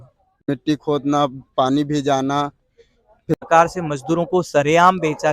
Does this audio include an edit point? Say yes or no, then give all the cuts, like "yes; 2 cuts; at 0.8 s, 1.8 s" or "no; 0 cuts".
yes; 1 cut; at 3.4 s